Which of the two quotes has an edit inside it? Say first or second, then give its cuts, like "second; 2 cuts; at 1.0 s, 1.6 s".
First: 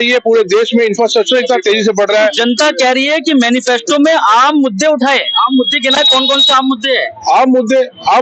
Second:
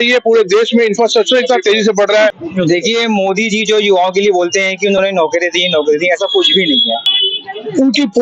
second; 2 cuts; at 2.4 s, 7.1 s